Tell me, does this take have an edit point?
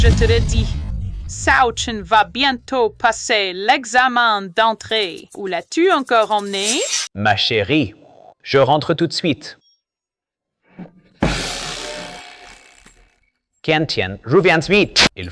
yes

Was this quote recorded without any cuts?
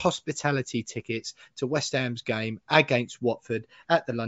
yes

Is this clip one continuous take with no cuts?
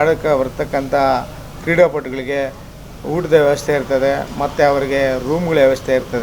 yes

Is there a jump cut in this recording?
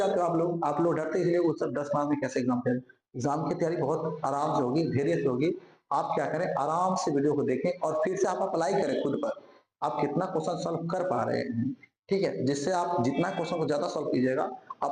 no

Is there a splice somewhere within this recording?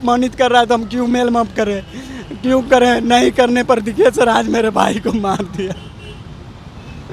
no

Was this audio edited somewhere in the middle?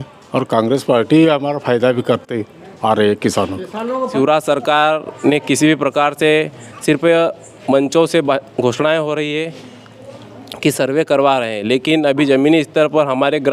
yes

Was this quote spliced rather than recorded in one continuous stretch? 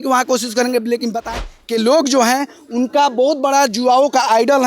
yes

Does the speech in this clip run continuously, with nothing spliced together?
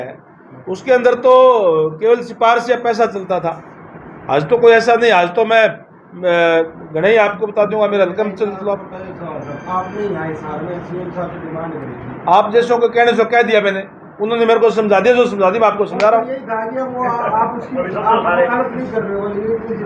yes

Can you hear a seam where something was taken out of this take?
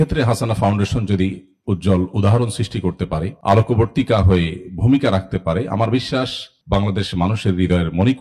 no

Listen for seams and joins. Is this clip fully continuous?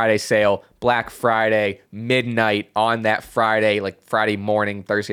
yes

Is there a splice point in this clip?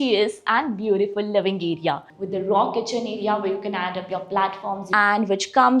yes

